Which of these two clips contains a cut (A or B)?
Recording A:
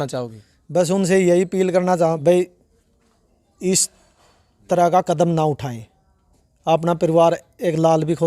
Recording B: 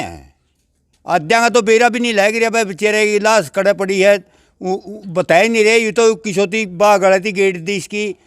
A